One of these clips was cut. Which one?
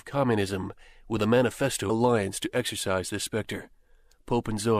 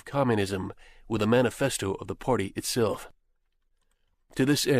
second; 1 cut; at 1.8 s

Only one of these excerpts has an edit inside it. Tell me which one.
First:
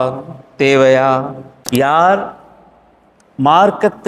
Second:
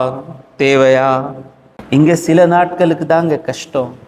first; 1 cut; at 1.5 s

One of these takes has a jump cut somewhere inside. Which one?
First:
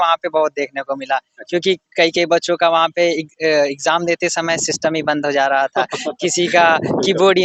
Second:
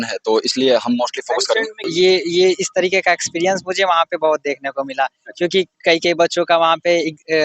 second; 1 cut; at 1.9 s

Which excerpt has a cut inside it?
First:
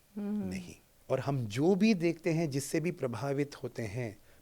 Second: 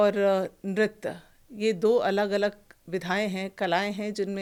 first; 1 cut; at 0.9 s

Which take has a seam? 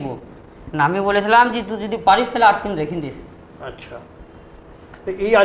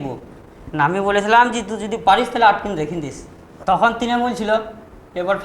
second; 1 cut; at 3.5 s

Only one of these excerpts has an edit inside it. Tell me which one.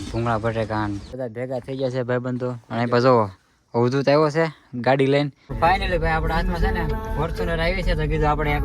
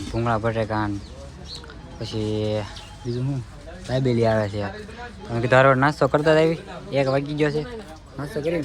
first; 2 cuts; at 1.1 s, 5.8 s

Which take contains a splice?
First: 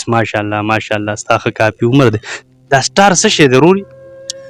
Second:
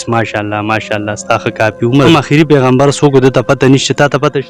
second; 1 cut; at 2.1 s

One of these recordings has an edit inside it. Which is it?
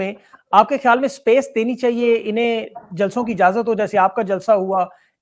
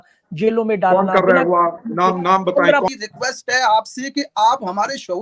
second; 1 cut; at 2.9 s

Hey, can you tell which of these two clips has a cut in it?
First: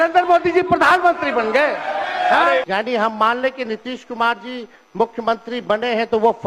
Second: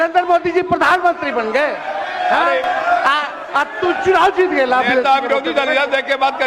first; 1 cut; at 2.6 s

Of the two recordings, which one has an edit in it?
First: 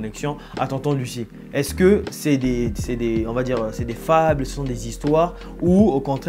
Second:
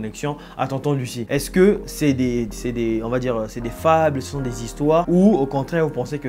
second; 2 cuts; at 1.2 s, 5.1 s

